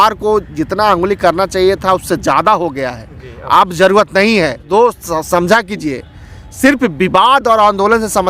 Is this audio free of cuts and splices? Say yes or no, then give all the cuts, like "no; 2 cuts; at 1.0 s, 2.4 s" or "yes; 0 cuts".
no; 1 cut; at 4.7 s